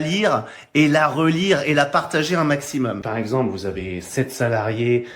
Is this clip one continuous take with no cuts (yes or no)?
no